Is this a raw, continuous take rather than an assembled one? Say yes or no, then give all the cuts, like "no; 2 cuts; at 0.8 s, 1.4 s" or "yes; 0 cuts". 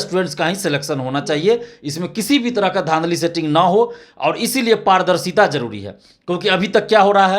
yes; 0 cuts